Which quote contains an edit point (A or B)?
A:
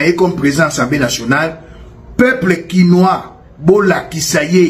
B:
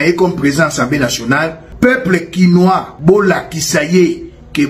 B